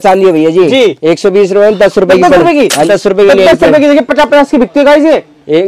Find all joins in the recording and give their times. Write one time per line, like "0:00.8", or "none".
0:02.9